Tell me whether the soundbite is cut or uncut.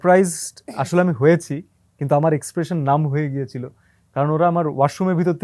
uncut